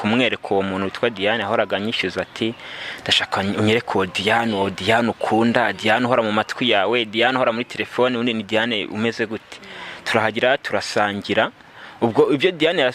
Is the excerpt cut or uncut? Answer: uncut